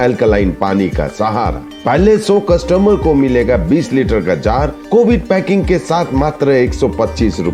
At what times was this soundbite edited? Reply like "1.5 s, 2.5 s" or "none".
none